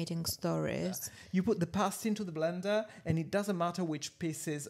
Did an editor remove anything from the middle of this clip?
yes; 1 cut; at 1.1 s

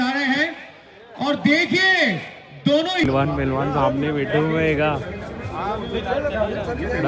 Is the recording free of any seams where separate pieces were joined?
no; 1 cut; at 3.0 s

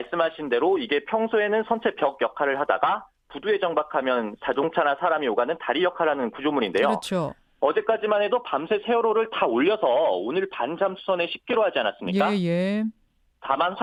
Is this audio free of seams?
yes; 0 cuts

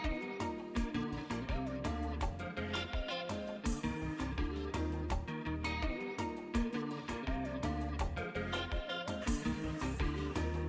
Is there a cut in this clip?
no; 0 cuts

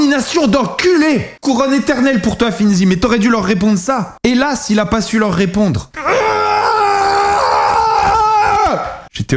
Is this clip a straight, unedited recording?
yes; 0 cuts

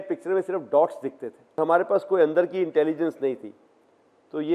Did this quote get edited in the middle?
yes; 1 cut; at 1.6 s

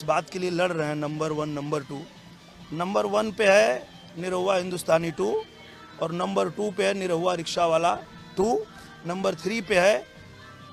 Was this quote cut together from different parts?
no; 0 cuts

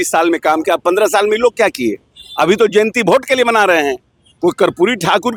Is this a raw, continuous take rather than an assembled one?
yes; 0 cuts

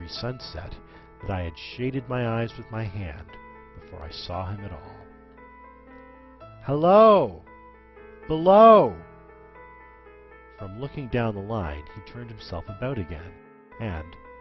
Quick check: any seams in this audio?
yes; 1 cut; at 1.5 s

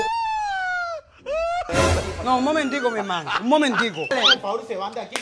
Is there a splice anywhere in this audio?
yes; 2 cuts; at 1.7 s, 4.1 s

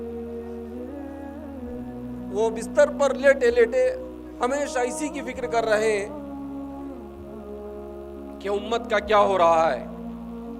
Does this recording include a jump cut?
no; 0 cuts

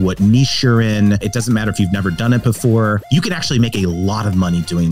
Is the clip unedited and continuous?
no; 2 cuts; at 1.2 s, 3.0 s

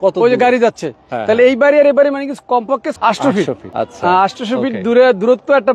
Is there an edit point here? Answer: yes; 2 cuts; at 2.9 s, 3.6 s

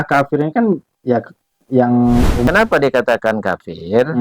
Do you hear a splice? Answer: yes; 1 cut; at 2.4 s

